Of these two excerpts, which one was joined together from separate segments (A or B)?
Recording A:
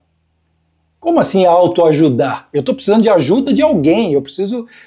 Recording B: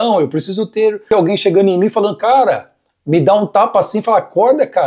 B